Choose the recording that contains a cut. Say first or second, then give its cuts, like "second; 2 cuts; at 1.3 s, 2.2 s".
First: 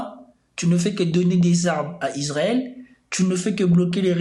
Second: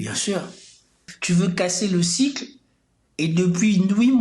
second; 1 cut; at 1.1 s